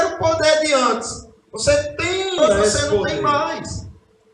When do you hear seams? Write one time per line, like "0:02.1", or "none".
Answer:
0:03.1